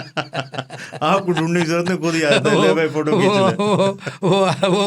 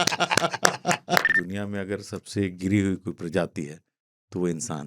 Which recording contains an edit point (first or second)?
second